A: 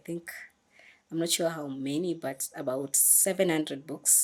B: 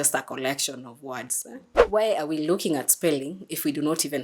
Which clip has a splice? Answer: B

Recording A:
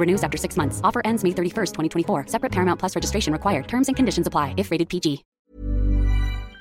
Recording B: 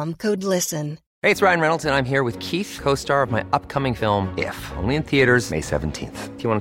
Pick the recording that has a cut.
B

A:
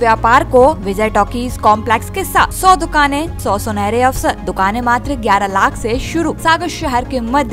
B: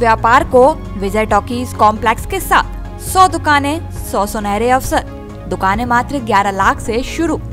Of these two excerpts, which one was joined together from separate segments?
A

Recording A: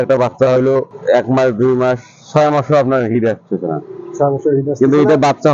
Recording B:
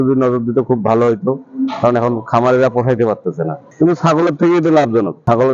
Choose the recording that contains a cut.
B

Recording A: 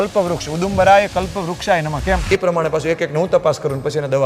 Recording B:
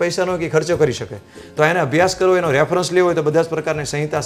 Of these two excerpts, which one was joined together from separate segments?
A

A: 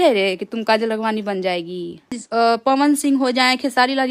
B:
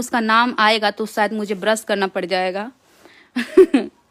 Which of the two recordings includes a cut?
A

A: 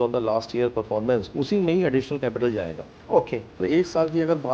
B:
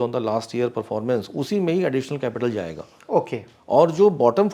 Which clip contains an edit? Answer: A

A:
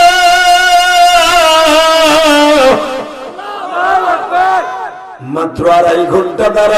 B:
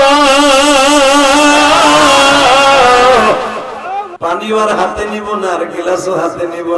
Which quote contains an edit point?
B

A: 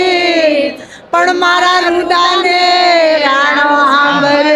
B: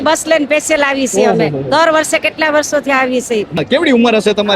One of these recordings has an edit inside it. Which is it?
B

